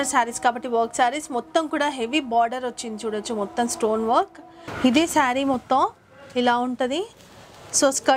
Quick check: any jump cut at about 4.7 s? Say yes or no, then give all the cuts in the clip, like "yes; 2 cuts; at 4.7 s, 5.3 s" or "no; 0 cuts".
no; 0 cuts